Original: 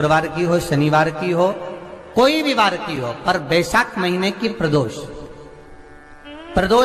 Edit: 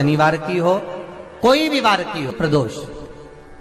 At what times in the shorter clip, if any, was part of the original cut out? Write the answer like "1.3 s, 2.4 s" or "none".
2.3 s